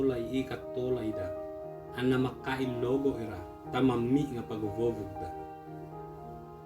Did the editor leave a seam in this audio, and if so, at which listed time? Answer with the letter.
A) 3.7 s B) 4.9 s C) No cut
B